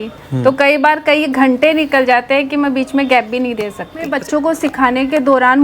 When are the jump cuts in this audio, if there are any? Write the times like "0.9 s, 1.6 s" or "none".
4.2 s